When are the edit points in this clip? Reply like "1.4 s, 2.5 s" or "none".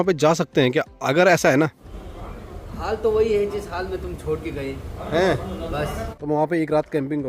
1.9 s, 6.1 s